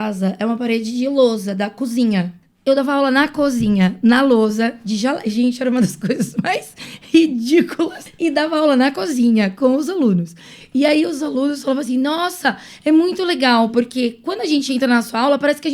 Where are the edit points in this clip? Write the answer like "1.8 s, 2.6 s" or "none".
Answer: 2.4 s, 8.0 s